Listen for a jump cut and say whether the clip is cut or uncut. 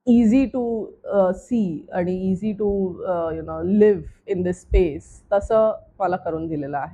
uncut